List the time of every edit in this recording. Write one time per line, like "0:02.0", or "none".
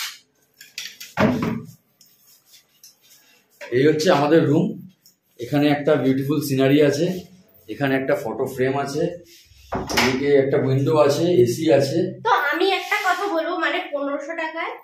none

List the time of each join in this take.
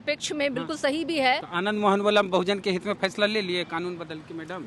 0:01.5

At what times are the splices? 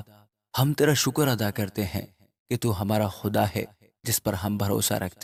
none

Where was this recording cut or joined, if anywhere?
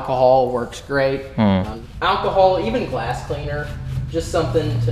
0:01.8

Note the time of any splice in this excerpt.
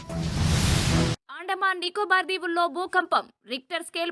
0:01.1

